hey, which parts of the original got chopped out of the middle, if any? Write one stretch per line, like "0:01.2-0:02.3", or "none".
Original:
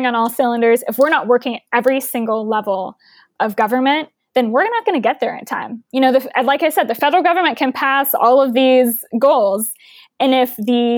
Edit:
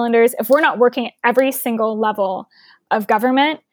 none